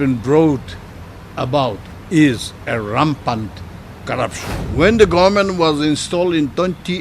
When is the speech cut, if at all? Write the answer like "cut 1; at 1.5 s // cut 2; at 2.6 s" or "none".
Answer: cut 1; at 1.9 s // cut 2; at 4.5 s